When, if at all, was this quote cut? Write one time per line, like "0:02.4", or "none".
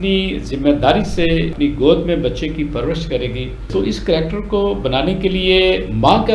0:03.7